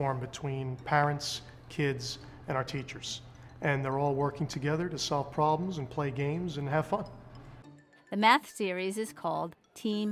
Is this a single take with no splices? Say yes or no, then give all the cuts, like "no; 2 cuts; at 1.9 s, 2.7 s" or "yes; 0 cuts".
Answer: yes; 0 cuts